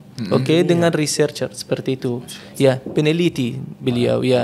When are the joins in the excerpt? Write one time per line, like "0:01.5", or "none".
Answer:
none